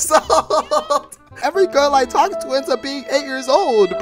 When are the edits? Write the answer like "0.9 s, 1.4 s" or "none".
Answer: 1.3 s